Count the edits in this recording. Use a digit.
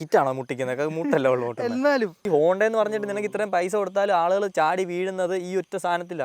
1